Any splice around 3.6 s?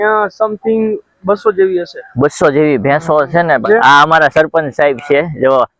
yes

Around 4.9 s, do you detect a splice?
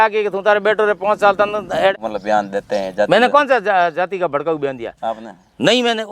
no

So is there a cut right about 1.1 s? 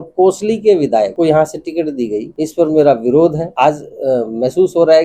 yes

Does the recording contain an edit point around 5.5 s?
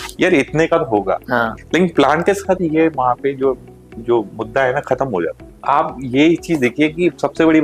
yes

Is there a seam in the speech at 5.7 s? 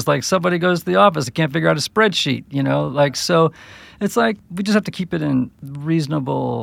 yes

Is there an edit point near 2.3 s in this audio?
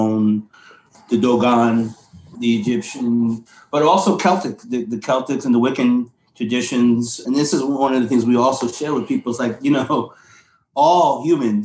yes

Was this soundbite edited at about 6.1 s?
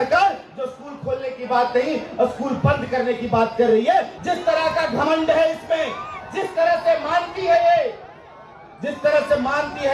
no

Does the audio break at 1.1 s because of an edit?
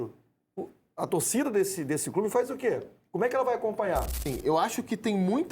no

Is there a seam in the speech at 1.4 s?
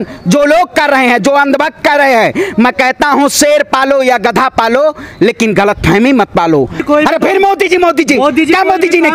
no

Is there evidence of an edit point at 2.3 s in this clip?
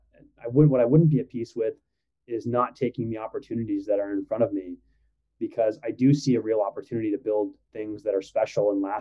no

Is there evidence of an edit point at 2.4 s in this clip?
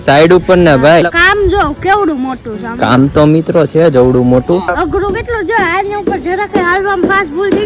no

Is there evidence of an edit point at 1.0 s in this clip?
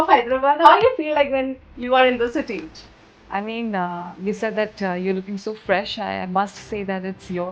no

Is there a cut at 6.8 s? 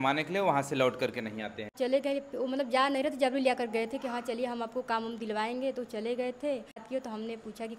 yes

